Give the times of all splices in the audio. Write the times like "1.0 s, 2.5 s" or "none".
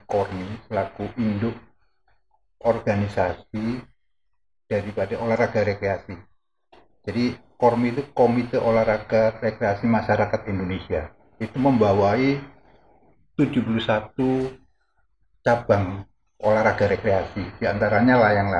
none